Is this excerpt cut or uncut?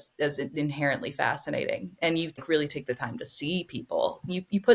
cut